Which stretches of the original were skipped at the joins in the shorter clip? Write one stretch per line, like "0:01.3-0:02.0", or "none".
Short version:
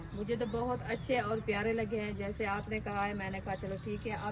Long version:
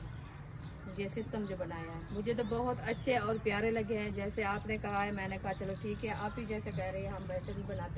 none

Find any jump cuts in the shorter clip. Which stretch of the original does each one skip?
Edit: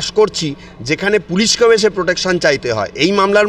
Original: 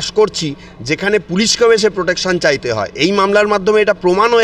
none

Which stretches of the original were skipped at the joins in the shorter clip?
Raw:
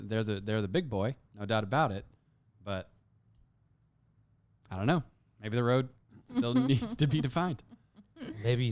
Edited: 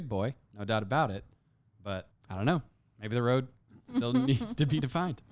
0:03.0-0:04.6

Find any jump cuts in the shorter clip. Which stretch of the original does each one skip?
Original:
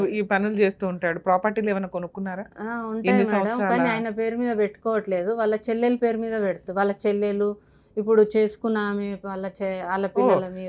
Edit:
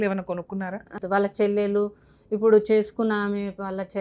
0:02.6-0:06.6

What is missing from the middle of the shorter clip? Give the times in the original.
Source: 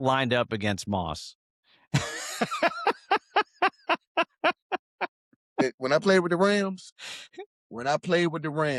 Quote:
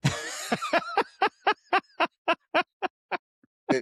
none

